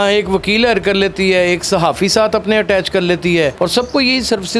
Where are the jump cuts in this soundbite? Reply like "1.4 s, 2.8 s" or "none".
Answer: 3.5 s